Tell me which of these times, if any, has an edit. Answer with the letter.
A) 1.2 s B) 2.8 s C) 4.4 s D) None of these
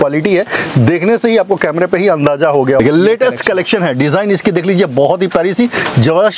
B